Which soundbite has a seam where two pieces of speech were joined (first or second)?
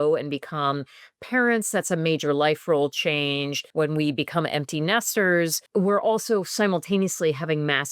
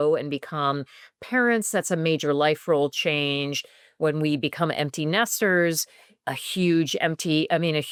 first